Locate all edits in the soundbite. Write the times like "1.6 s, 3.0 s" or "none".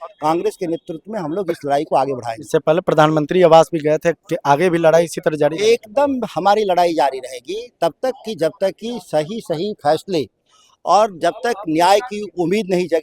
none